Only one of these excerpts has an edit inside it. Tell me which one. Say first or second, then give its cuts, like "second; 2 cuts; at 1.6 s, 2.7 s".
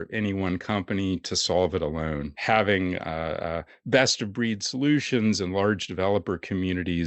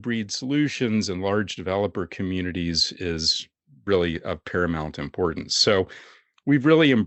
first; 1 cut; at 2.3 s